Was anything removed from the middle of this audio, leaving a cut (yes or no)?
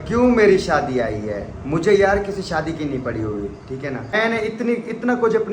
yes